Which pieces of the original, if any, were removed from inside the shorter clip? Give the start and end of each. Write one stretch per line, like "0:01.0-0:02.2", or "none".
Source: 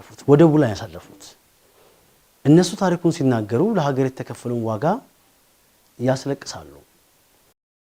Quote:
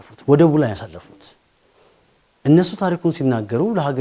none